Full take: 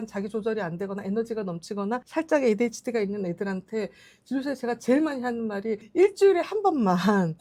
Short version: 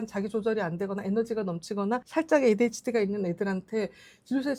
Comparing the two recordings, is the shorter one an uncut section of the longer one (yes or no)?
yes